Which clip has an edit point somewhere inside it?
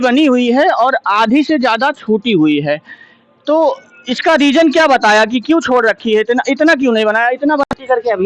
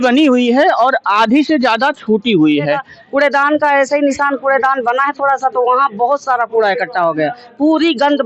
second; 1 cut; at 2.9 s

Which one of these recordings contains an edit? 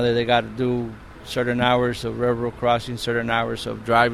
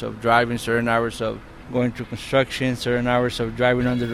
second; 1 cut; at 1.5 s

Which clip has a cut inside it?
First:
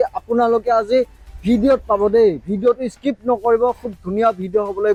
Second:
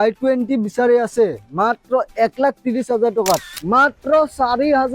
second; 1 cut; at 3.6 s

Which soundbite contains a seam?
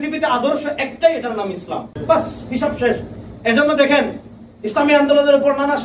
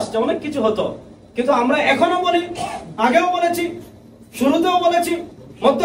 first; 1 cut; at 1.9 s

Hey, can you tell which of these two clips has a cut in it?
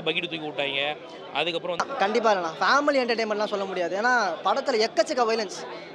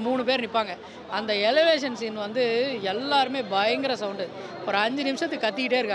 first; 1 cut; at 1.8 s

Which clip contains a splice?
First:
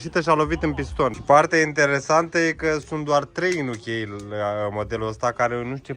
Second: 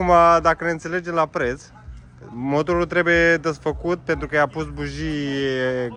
first; 1 cut; at 1.2 s

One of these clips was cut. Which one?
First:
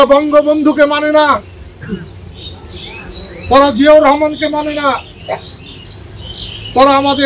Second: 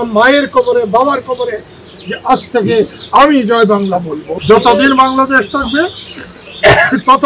second; 1 cut; at 4.2 s

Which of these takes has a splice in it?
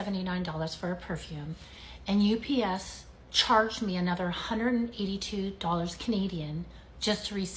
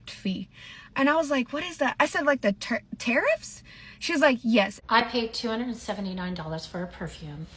second; 1 cut; at 4.8 s

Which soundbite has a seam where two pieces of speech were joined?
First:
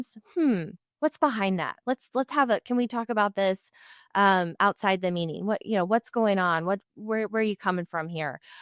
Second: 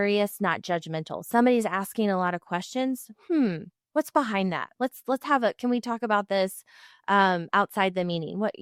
first; 1 cut; at 6.8 s

